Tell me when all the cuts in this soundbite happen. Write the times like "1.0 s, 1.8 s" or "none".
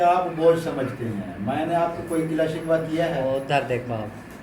none